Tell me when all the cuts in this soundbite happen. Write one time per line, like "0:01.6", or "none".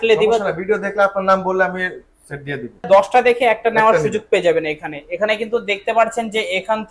0:02.9

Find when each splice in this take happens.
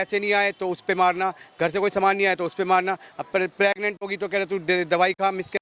none

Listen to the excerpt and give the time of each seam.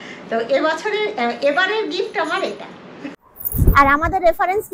0:03.1

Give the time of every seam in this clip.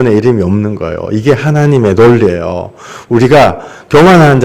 none

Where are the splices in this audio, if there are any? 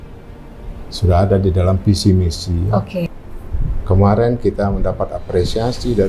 0:03.1

